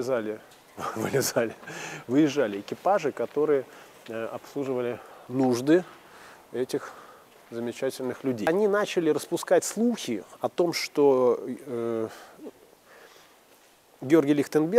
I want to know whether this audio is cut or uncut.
cut